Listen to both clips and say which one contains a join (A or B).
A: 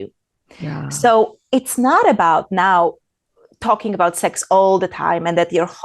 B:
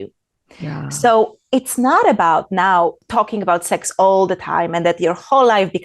B